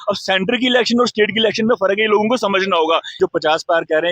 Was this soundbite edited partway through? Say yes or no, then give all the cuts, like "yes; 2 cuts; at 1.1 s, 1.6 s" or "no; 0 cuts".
yes; 1 cut; at 3.2 s